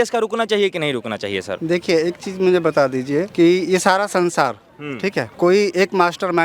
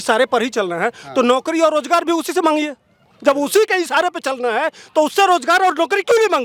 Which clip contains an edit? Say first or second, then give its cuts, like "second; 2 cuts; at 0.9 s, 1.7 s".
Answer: first; 3 cuts; at 1.5 s, 3.3 s, 5.3 s